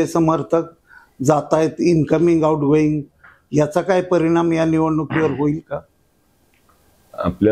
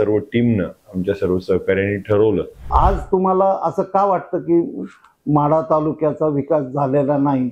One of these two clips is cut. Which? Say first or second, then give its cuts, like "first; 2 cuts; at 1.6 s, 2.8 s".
second; 1 cut; at 2.7 s